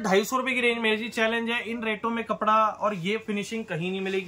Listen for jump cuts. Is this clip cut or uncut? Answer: uncut